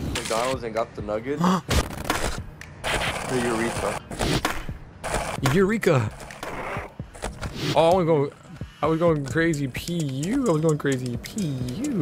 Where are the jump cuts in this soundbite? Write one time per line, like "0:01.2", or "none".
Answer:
none